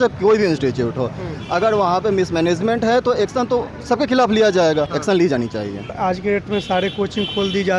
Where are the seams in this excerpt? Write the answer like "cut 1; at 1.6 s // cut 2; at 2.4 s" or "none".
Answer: cut 1; at 4.9 s // cut 2; at 5.9 s